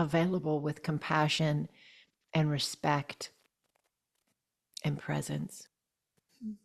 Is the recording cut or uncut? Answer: uncut